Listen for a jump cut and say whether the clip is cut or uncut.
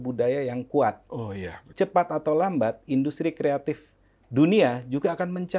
cut